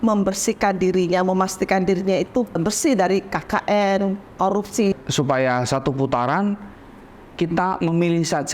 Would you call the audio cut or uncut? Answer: cut